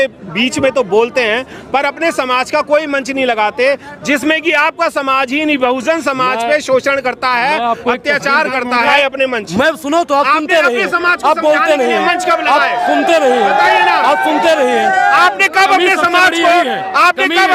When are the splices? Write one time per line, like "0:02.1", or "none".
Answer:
0:08.9